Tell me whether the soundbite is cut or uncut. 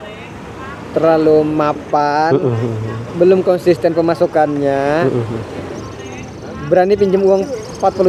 uncut